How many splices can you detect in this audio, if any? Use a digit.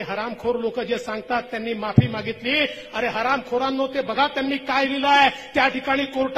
0